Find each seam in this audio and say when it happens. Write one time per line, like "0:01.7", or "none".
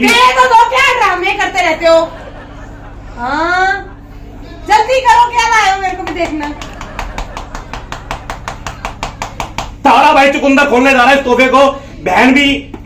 none